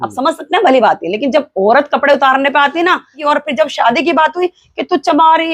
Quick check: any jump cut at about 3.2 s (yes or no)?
yes